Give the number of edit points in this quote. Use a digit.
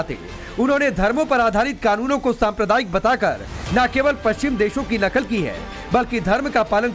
0